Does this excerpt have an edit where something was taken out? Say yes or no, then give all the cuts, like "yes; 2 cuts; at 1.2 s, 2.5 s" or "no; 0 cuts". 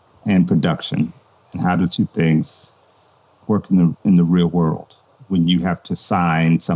no; 0 cuts